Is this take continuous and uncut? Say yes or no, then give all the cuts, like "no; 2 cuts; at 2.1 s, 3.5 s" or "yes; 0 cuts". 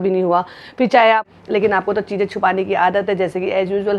no; 1 cut; at 1.2 s